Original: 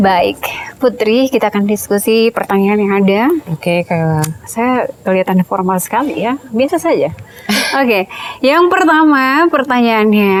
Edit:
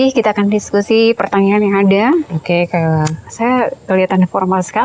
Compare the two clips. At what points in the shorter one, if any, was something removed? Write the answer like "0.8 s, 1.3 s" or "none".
none